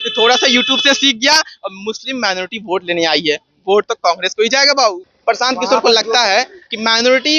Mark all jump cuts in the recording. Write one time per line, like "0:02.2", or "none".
0:05.0